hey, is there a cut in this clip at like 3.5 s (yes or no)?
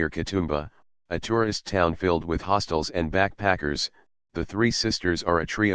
no